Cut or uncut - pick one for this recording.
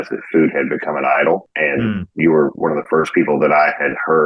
uncut